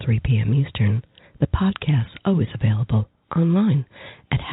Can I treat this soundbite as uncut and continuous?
yes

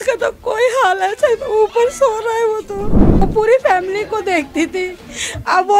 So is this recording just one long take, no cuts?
no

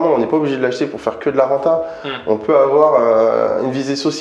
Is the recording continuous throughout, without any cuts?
yes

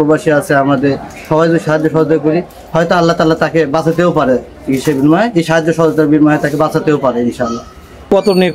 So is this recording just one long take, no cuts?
yes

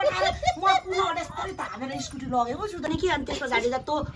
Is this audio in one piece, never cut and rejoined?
no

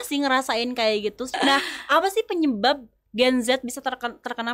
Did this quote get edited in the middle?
yes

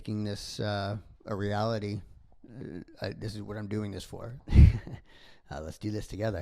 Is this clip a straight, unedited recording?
no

